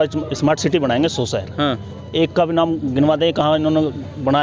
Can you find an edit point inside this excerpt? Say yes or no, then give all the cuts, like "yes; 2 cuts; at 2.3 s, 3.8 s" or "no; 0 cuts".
no; 0 cuts